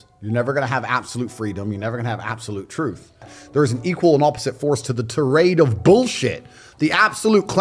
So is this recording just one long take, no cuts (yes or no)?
no